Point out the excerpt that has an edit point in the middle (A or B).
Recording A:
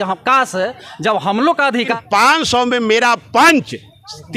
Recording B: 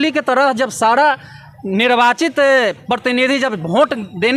A